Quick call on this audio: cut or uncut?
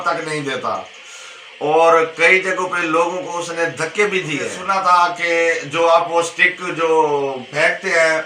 cut